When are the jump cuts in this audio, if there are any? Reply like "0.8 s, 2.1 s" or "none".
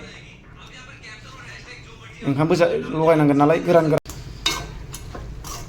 4.0 s